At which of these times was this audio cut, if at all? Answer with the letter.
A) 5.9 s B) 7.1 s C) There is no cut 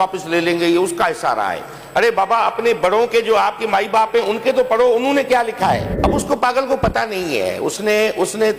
A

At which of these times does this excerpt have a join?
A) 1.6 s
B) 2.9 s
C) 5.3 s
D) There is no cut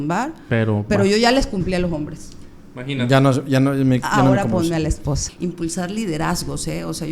C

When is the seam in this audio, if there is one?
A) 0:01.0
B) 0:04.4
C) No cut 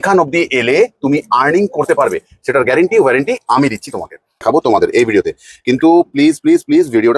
B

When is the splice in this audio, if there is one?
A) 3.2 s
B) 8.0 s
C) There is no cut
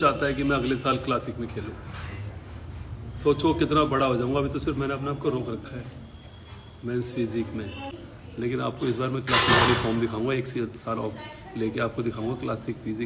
B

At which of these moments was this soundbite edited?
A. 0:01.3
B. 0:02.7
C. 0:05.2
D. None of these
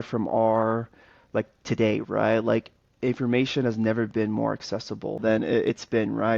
C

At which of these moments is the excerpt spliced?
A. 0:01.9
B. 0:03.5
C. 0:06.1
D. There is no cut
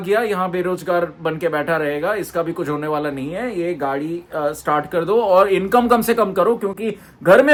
D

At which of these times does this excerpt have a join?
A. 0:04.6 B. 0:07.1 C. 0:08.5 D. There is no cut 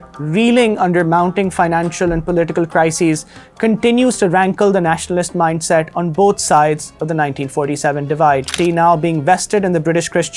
C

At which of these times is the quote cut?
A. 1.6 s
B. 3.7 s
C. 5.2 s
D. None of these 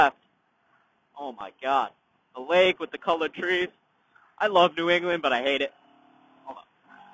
D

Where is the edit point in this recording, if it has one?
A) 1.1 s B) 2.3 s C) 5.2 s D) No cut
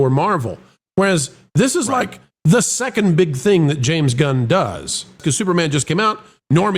C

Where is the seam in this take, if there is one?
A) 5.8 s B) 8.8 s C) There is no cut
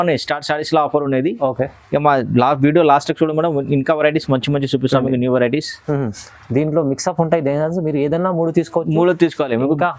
C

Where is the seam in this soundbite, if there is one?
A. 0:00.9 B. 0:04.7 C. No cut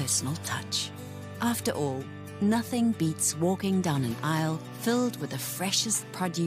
B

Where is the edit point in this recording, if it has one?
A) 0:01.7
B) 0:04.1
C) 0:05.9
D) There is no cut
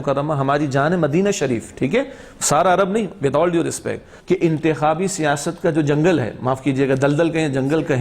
B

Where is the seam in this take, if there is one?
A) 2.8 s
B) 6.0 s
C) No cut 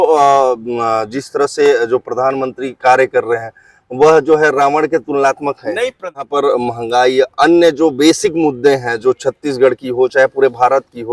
B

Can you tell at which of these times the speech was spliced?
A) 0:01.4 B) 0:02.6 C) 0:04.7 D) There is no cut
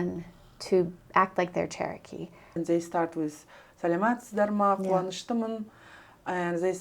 B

